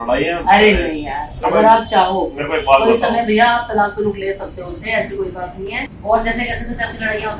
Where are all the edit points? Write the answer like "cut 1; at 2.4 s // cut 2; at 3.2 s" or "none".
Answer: cut 1; at 1.4 s // cut 2; at 5.9 s